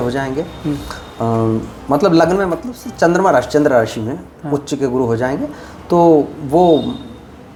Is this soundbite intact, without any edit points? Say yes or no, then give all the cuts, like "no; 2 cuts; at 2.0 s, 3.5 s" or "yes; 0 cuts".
yes; 0 cuts